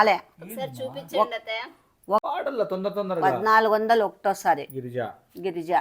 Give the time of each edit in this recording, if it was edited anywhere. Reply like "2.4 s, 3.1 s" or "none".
2.2 s